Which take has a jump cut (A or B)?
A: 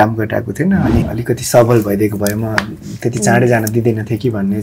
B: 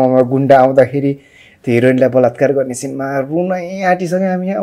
A